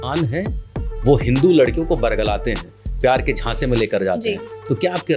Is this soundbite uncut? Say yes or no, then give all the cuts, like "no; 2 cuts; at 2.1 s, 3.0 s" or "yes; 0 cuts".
yes; 0 cuts